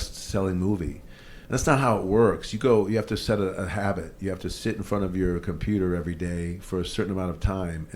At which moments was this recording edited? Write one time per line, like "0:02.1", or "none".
none